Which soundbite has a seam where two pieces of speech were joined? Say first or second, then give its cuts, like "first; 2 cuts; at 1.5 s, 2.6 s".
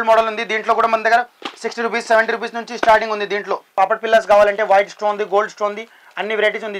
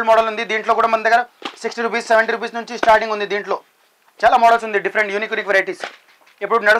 first; 1 cut; at 3.7 s